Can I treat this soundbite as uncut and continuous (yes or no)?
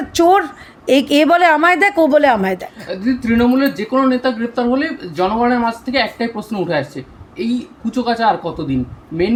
yes